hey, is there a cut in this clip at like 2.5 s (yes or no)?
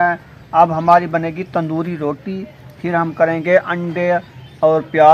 no